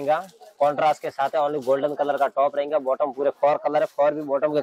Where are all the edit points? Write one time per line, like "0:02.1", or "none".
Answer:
none